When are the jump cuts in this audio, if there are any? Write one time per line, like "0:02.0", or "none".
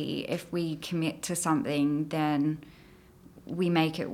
none